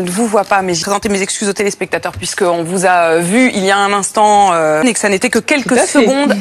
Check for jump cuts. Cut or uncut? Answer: cut